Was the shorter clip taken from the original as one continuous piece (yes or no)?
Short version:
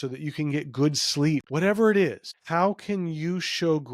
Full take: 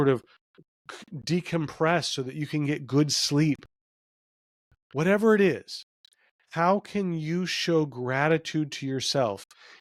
no